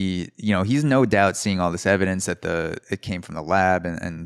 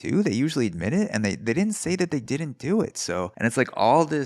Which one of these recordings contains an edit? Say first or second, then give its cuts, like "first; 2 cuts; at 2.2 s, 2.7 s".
second; 1 cut; at 3.3 s